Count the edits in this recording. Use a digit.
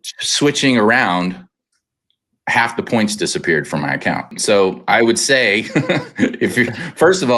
1